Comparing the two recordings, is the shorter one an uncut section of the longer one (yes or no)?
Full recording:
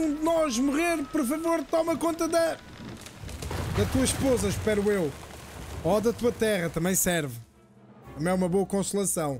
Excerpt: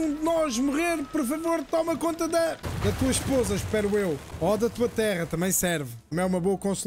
no